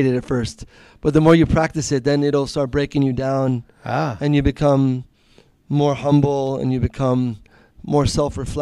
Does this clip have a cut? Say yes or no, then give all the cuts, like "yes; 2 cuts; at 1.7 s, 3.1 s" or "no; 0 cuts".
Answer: no; 0 cuts